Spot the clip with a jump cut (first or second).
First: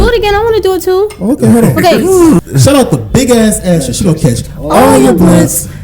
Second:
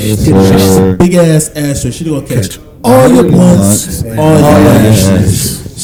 first